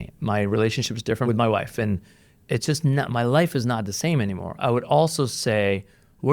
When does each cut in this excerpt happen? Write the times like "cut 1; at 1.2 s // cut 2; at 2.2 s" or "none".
cut 1; at 1.3 s